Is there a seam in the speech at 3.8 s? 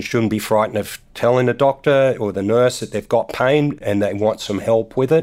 yes; 1 cut; at 3.8 s

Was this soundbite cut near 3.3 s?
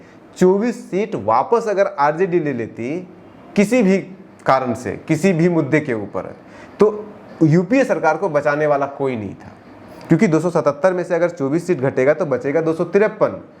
no; 0 cuts

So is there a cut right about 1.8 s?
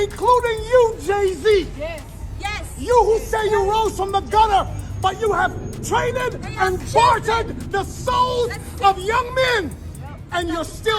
no; 0 cuts

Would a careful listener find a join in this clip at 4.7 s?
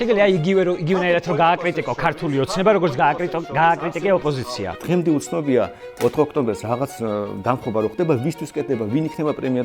yes; 1 cut; at 4.7 s

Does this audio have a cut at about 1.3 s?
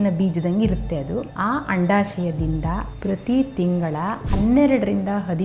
yes; 3 cuts; at 1.3 s, 2.9 s, 4.2 s

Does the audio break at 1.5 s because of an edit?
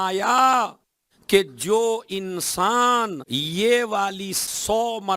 no; 2 cuts; at 3.3 s, 4.4 s

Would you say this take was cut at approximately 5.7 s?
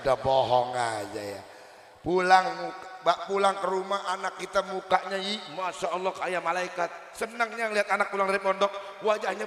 no; 0 cuts

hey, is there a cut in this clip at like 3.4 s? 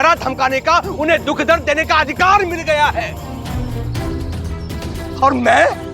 yes; 1 cut; at 3.4 s

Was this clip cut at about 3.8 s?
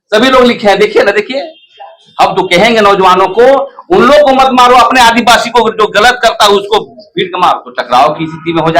no; 1 cut; at 7.7 s

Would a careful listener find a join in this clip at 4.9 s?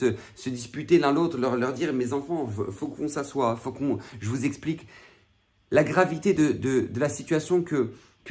no; 0 cuts

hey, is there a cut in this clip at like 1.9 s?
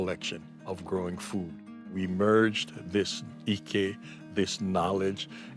yes; 1 cut; at 1.9 s

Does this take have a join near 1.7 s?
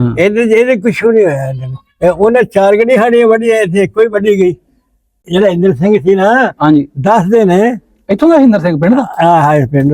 no; 1 cut; at 5.2 s

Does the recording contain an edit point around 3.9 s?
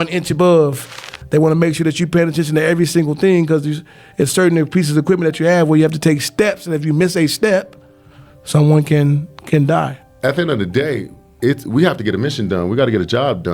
no; 1 cut; at 10.0 s

